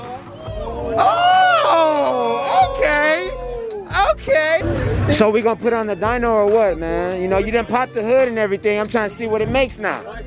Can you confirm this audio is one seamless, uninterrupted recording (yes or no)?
no